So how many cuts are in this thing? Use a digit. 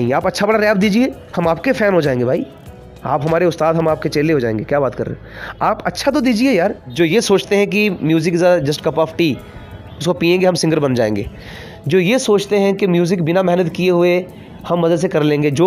1